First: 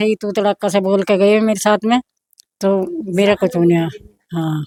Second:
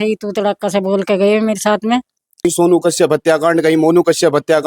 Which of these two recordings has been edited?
second; 1 cut; at 2.4 s

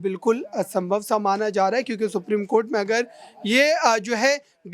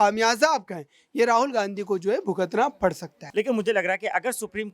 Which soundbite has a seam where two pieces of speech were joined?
second; 1 cut; at 3.1 s

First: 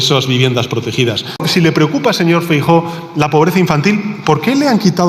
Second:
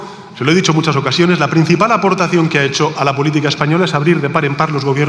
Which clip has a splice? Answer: first; 1 cut; at 1.4 s

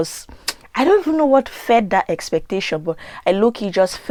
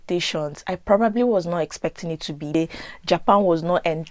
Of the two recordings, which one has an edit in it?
second; 1 cut; at 2.5 s

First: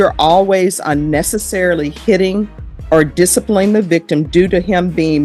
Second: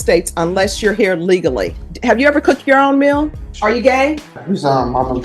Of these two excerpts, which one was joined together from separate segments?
second; 3 cuts; at 1.9 s, 3.4 s, 4.4 s

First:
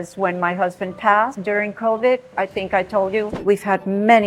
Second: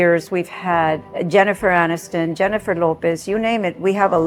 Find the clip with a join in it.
first; 1 cut; at 3.4 s

